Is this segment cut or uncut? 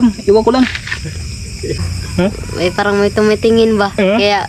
cut